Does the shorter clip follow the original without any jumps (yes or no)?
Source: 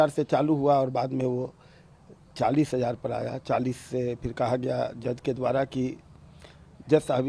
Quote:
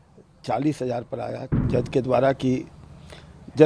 no